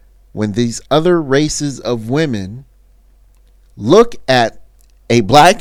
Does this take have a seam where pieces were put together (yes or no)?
no